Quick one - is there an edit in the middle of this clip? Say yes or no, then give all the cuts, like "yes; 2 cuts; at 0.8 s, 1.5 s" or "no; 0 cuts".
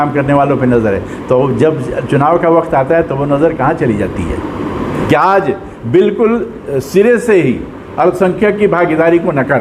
yes; 1 cut; at 5.0 s